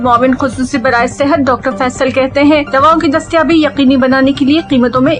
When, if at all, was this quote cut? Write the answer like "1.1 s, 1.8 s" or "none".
none